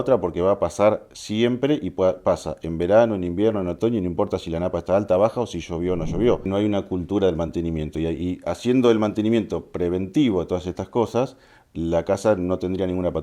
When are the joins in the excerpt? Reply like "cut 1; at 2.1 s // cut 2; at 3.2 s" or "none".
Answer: cut 1; at 6.5 s